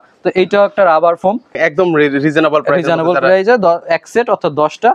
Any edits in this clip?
yes; 1 cut; at 1.6 s

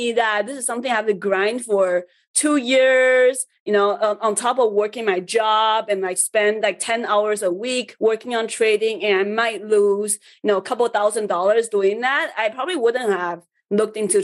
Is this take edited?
no; 0 cuts

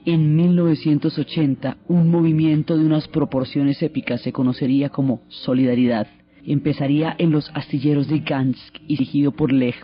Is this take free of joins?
no; 1 cut; at 6.6 s

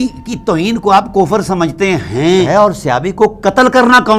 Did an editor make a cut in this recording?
yes; 1 cut; at 2.5 s

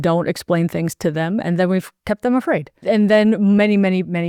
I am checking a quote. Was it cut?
yes; 2 cuts; at 1.9 s, 2.7 s

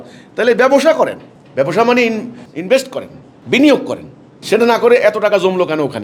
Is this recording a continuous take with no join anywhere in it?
yes; 0 cuts

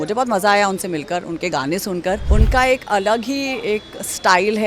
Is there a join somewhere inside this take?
yes; 1 cut; at 2.2 s

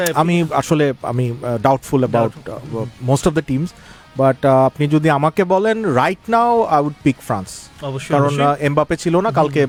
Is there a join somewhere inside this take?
no; 0 cuts

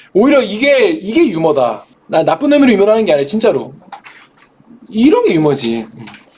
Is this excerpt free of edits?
no; 1 cut; at 1.9 s

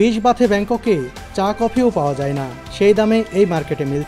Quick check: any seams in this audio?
no; 0 cuts

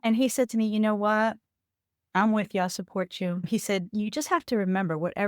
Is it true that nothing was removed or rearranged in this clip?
no; 1 cut; at 3.4 s

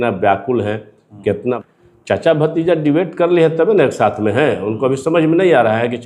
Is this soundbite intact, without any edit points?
no; 1 cut; at 1.6 s

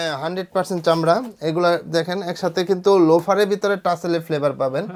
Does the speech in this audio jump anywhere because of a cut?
no; 0 cuts

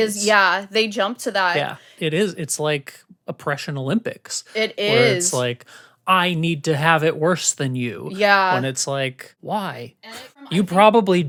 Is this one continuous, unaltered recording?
yes; 0 cuts

